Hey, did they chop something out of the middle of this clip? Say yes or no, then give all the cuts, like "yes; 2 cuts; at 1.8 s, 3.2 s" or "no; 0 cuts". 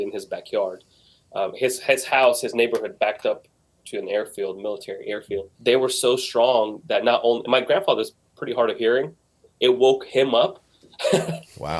yes; 1 cut; at 5.5 s